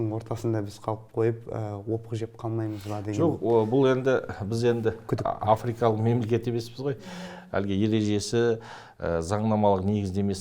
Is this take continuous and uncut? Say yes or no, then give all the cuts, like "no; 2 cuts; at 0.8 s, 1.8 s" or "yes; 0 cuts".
yes; 0 cuts